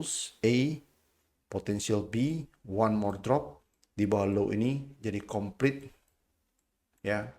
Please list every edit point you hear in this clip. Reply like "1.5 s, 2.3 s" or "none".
none